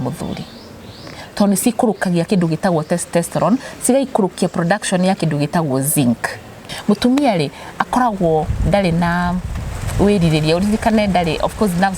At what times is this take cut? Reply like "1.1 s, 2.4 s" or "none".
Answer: 6.7 s